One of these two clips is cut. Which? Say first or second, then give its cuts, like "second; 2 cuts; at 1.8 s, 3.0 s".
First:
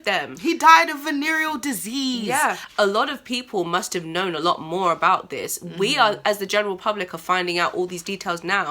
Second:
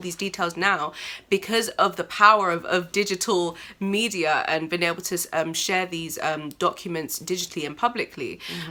first; 1 cut; at 2.6 s